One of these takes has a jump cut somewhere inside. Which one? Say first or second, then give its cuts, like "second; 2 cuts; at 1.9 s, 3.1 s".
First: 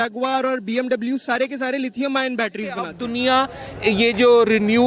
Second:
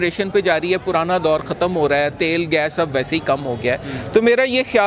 first; 1 cut; at 3.0 s